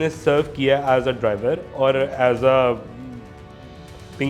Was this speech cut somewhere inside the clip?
no; 0 cuts

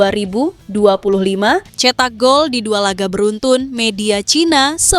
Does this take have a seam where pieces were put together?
yes; 1 cut; at 1.7 s

